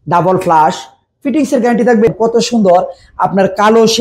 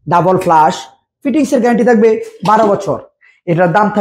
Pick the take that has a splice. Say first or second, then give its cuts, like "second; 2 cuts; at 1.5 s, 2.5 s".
first; 1 cut; at 2.1 s